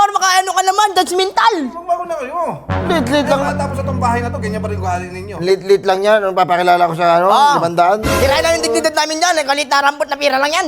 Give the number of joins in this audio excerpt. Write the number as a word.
zero